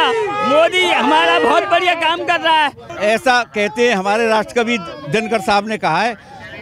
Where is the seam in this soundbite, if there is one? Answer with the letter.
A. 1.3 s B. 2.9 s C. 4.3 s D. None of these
B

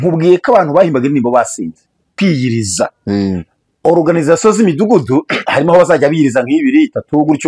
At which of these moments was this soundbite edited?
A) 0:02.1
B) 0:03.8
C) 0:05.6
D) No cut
A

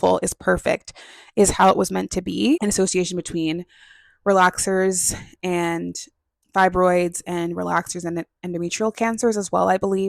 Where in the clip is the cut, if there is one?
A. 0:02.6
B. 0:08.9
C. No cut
A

